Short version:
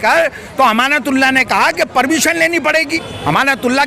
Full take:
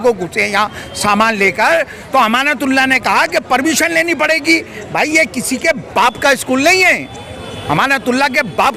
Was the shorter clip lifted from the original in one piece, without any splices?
no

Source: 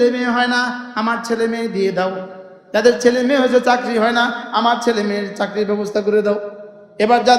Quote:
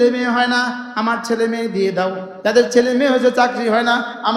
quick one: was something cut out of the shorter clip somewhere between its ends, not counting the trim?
yes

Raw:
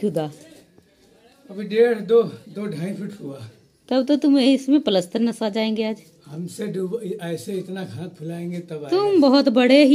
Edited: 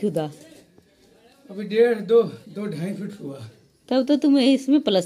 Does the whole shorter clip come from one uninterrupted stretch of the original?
yes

